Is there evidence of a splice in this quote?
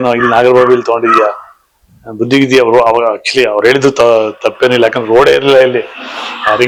no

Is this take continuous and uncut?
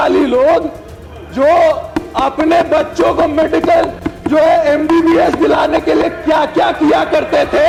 yes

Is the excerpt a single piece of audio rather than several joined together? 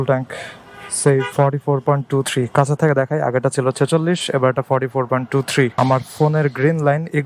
no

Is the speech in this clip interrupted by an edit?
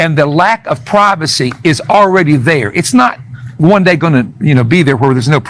no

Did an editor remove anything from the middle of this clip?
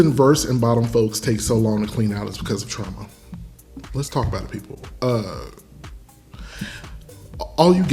no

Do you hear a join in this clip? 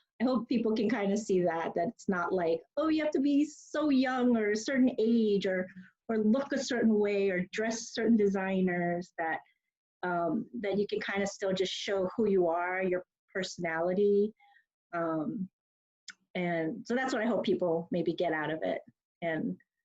no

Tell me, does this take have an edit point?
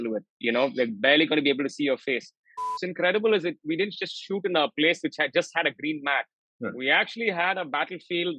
yes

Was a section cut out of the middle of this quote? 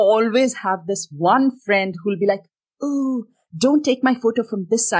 no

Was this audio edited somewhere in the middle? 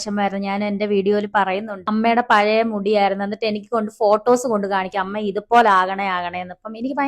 yes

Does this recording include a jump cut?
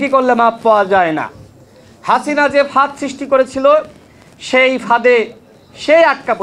no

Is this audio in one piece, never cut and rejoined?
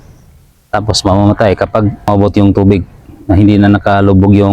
no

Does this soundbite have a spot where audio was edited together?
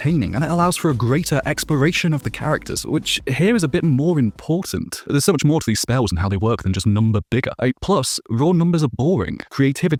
no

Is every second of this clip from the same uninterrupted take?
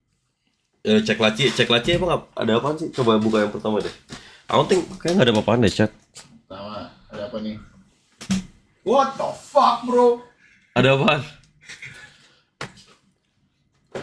yes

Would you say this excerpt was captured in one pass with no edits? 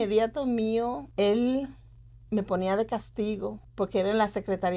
no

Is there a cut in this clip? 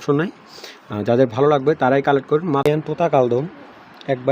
yes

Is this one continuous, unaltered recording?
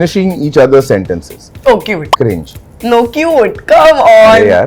yes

